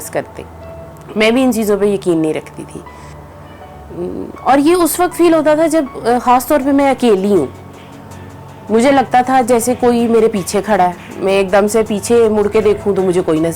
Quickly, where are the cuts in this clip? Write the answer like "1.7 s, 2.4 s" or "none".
3.3 s